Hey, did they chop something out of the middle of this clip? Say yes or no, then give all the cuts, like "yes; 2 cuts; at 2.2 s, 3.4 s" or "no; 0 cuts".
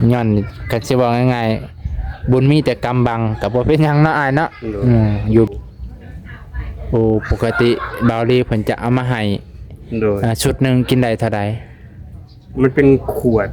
yes; 1 cut; at 5.5 s